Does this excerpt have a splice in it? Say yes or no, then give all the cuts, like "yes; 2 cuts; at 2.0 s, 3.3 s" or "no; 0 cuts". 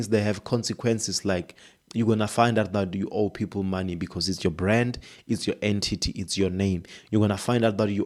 no; 0 cuts